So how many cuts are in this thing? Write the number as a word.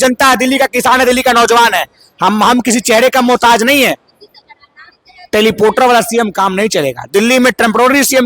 one